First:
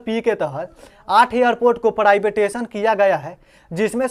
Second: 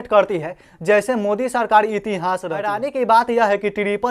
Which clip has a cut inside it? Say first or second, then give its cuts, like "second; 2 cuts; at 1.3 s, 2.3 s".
second; 1 cut; at 2.8 s